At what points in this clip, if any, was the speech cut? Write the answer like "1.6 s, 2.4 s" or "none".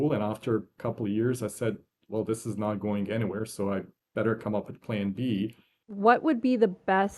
5.9 s

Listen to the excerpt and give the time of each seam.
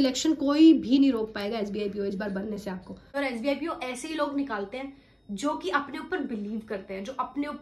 3.2 s

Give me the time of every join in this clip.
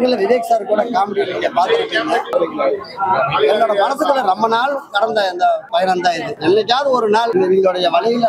2.3 s, 5.8 s, 7.3 s

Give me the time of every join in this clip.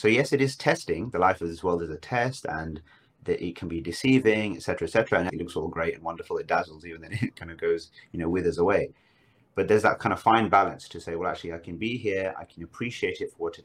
5.3 s

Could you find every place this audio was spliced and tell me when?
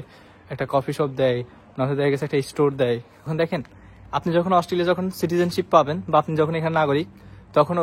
3.2 s

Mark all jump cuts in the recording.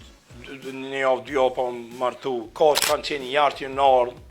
2.8 s

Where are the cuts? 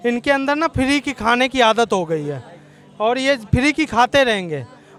none

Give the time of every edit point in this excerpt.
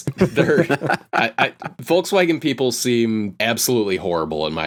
none

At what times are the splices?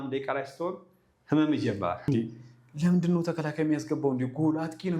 2.0 s

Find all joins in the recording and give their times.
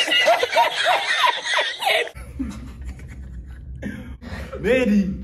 4.2 s

